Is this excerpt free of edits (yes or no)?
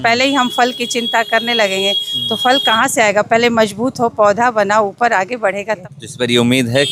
no